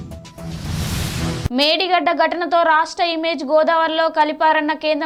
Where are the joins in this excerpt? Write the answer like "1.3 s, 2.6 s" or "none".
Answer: none

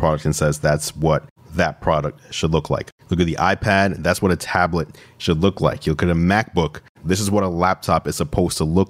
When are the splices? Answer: 6.9 s

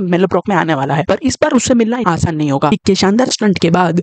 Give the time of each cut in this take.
2.7 s

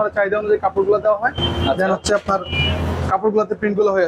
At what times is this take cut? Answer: none

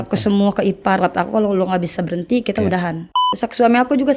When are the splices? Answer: 1.0 s, 3.0 s

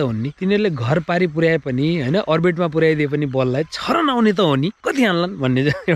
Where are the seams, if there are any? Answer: none

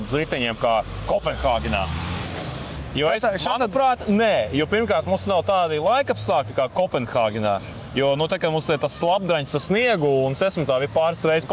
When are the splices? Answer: none

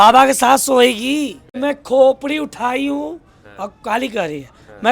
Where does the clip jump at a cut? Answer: 1.4 s

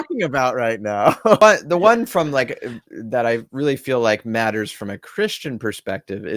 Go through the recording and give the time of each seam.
1.4 s

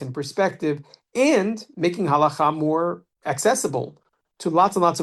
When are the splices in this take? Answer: 3.1 s

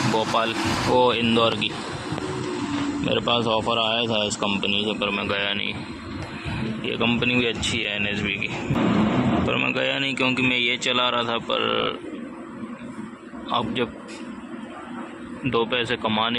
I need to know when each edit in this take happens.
8.8 s

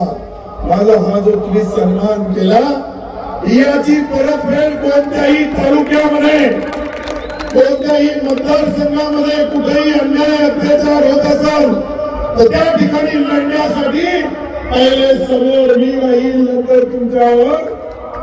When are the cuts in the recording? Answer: none

